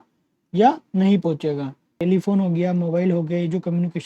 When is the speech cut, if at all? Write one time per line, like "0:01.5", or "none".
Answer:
0:02.0